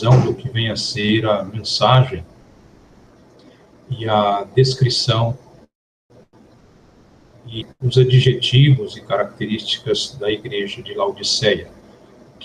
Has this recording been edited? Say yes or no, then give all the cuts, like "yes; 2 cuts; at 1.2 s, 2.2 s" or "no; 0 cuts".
yes; 1 cut; at 10.1 s